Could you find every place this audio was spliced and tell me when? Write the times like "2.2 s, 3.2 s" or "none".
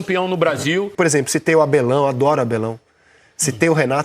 0.9 s